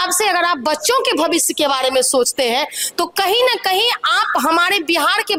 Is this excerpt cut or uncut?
uncut